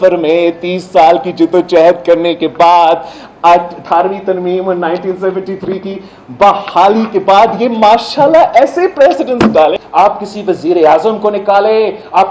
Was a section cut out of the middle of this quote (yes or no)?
yes